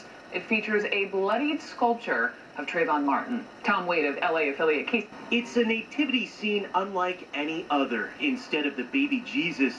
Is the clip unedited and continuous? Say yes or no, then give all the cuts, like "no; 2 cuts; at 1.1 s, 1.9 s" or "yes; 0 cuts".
no; 1 cut; at 5.1 s